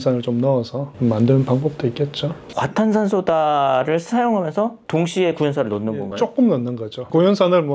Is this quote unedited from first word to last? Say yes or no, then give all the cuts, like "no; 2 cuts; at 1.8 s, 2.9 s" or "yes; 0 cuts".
yes; 0 cuts